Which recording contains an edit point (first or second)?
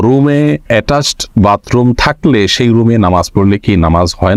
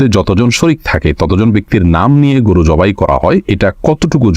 second